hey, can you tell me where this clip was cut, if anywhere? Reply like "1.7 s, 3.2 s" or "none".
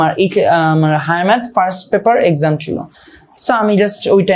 none

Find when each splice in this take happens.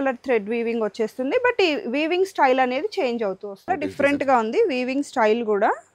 3.7 s

